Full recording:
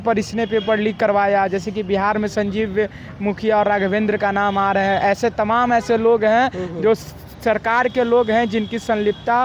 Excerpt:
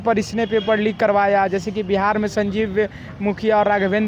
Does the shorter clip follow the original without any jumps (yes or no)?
yes